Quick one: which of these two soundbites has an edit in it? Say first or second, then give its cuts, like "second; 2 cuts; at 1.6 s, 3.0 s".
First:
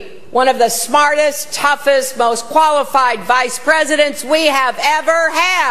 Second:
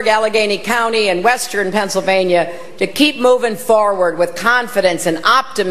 second; 1 cut; at 3.7 s